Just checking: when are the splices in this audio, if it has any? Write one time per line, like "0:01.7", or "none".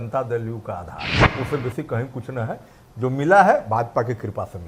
0:01.1